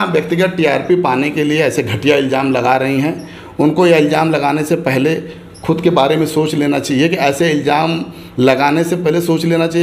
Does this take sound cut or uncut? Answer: uncut